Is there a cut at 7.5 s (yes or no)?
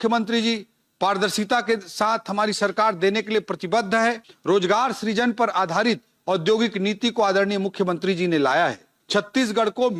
no